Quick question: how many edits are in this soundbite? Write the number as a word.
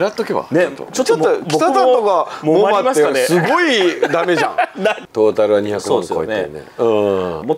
one